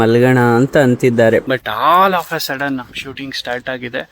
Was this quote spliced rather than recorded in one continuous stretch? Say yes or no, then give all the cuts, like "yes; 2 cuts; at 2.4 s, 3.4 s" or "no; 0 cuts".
yes; 1 cut; at 1.5 s